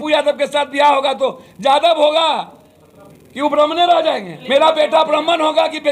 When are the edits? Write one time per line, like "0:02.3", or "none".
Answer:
0:04.3